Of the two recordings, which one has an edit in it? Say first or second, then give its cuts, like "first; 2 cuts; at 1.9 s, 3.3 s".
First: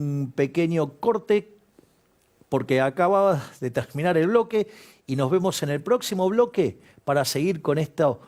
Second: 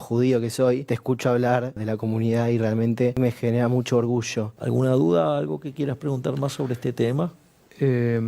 second; 4 cuts; at 0.9 s, 1.8 s, 3.2 s, 4.6 s